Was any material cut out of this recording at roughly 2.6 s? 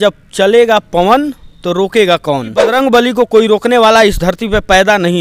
yes; 1 cut; at 2.6 s

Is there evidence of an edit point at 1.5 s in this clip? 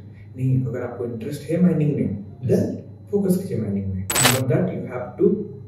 no; 1 cut; at 4.1 s

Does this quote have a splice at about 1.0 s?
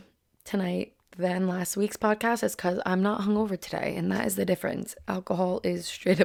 no; 0 cuts

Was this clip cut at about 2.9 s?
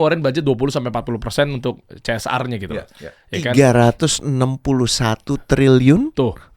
no; 0 cuts

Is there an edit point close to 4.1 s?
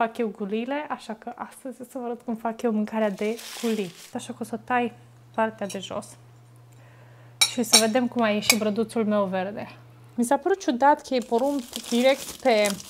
yes; 2 cuts; at 4.1 s, 10.1 s

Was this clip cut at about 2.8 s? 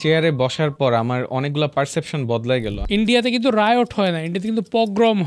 yes; 1 cut; at 2.8 s

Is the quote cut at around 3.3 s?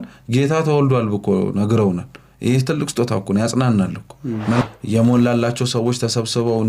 no; 1 cut; at 4.6 s

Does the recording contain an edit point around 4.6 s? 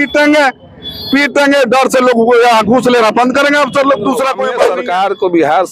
yes; 1 cut; at 4.6 s

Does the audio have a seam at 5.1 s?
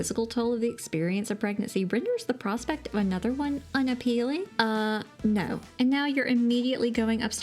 yes; 1 cut; at 5.1 s

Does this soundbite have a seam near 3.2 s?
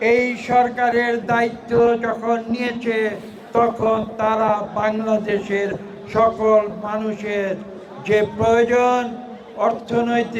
no; 0 cuts

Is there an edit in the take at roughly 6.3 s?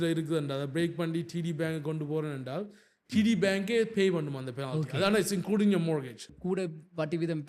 yes; 1 cut; at 6.3 s

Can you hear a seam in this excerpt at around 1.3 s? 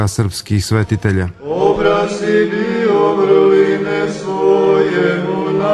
yes; 1 cut; at 1.3 s

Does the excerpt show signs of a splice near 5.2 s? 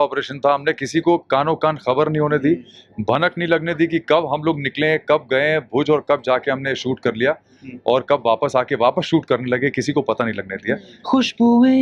no; 1 cut; at 10.9 s

